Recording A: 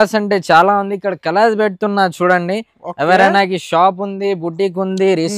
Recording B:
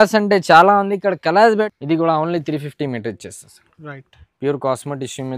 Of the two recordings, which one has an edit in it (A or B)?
B